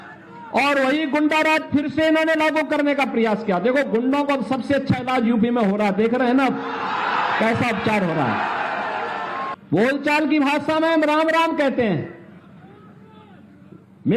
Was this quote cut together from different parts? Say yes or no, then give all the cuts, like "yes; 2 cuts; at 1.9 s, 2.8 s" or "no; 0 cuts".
yes; 1 cut; at 9.6 s